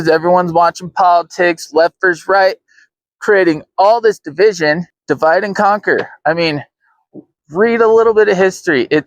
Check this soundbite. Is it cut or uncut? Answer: cut